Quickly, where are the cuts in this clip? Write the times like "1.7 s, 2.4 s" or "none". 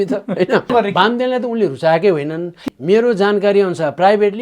0.7 s, 2.6 s